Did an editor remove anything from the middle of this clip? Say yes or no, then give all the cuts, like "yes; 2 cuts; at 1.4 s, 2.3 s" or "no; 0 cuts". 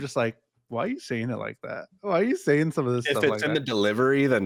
no; 0 cuts